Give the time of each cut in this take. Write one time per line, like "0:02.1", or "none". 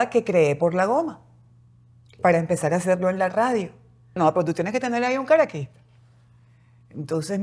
0:04.2